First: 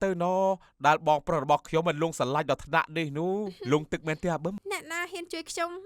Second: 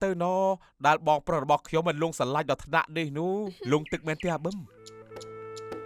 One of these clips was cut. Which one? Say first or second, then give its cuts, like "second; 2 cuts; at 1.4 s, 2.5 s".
first; 1 cut; at 4.6 s